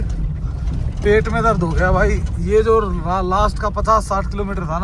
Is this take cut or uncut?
uncut